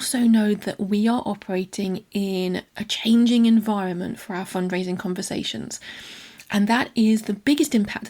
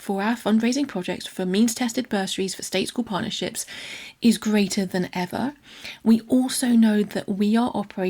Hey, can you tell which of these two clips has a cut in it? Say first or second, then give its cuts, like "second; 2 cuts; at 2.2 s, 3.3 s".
second; 1 cut; at 1.2 s